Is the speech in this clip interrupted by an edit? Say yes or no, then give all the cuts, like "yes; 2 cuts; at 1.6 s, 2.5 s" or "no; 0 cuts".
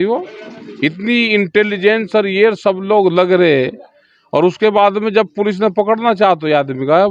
no; 0 cuts